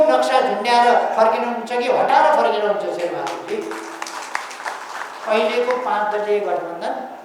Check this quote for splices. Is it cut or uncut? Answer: uncut